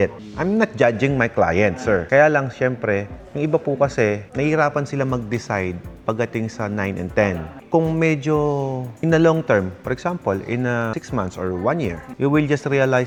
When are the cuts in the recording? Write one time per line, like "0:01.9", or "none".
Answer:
none